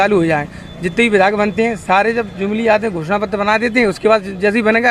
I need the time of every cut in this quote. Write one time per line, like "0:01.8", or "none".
none